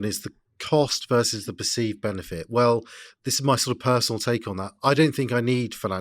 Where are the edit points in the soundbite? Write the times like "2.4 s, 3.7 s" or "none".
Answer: none